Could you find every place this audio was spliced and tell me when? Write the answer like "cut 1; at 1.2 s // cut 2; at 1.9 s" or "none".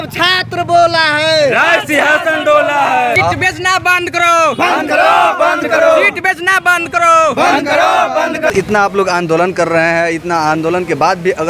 cut 1; at 3.2 s // cut 2; at 8.5 s